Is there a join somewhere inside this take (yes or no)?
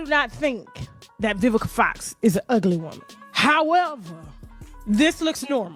no